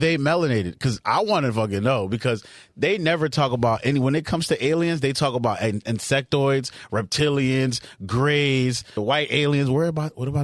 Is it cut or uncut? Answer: cut